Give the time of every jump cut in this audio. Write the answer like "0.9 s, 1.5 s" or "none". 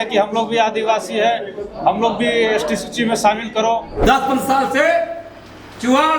4.0 s